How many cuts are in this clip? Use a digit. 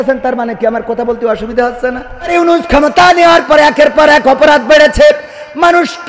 1